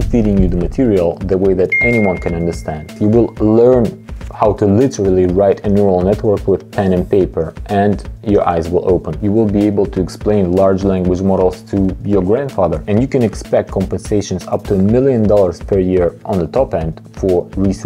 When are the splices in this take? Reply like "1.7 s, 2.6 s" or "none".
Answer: 2.9 s, 9.1 s, 12.8 s